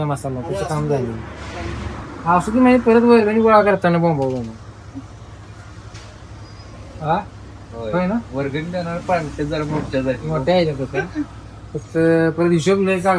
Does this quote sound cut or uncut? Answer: uncut